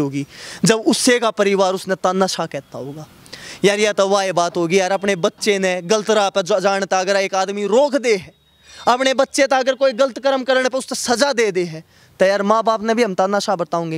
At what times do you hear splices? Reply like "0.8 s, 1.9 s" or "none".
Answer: none